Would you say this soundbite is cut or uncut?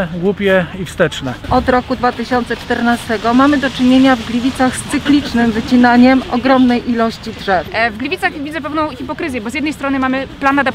cut